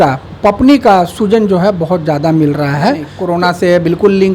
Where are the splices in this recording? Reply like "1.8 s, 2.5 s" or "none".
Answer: 3.1 s